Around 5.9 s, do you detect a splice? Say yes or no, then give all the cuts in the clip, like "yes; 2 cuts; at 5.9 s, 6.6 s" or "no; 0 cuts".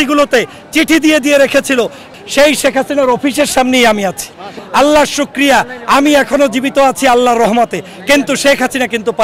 no; 2 cuts; at 2.1 s, 4.5 s